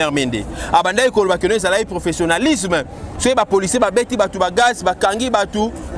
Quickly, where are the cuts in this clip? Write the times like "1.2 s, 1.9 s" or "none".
none